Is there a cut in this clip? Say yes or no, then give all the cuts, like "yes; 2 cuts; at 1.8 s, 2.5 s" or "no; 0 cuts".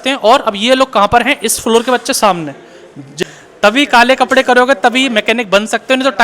yes; 1 cut; at 3.2 s